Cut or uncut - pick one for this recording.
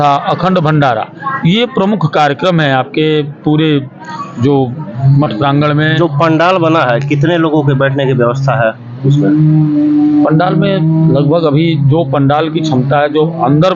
uncut